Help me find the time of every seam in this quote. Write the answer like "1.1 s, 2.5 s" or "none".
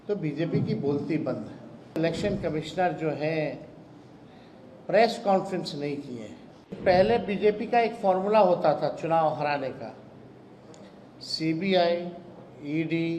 2.0 s, 6.8 s